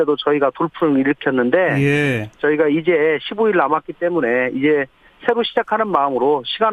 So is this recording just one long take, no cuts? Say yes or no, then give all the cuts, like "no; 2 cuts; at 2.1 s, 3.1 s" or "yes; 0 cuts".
no; 1 cut; at 2.3 s